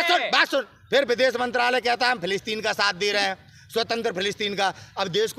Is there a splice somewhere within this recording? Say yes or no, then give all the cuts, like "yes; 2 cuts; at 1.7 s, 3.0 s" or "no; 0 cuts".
no; 0 cuts